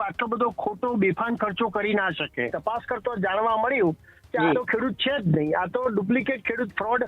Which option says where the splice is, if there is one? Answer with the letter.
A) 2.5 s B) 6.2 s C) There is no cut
A